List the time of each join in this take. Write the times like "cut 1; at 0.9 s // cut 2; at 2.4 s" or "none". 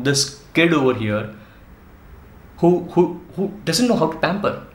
none